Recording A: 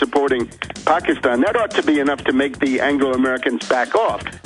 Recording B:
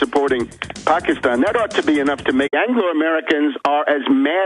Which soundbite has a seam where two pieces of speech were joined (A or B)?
A